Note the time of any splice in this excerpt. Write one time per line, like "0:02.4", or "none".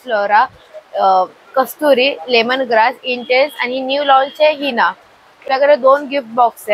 0:05.4